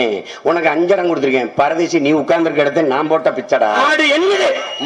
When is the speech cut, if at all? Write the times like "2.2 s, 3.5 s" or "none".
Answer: 3.8 s